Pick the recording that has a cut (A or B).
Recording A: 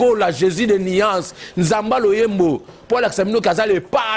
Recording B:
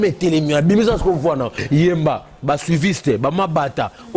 B